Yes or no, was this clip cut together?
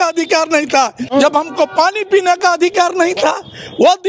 yes